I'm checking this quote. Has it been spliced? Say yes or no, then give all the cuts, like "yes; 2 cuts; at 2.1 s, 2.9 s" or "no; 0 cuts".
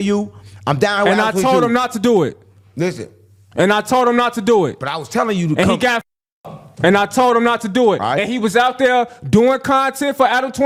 no; 0 cuts